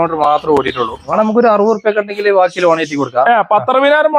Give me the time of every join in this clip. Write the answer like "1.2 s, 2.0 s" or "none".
1.1 s